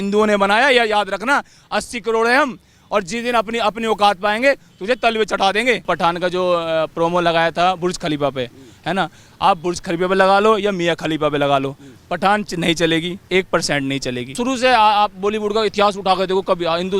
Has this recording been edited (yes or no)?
yes